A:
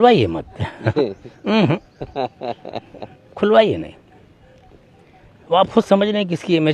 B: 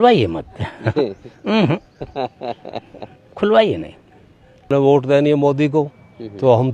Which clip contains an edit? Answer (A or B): B